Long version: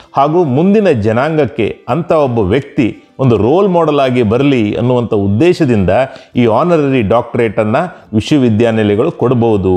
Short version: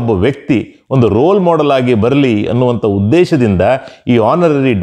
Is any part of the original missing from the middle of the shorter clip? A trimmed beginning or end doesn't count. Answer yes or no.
no